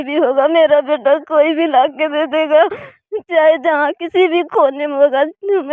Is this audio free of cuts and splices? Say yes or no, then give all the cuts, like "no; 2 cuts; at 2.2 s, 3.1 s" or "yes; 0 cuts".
yes; 0 cuts